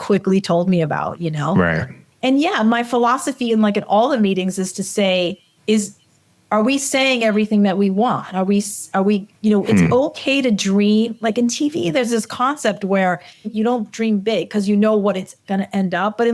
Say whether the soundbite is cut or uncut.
cut